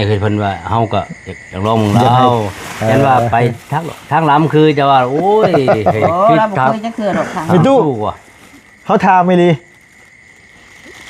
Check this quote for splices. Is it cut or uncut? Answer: uncut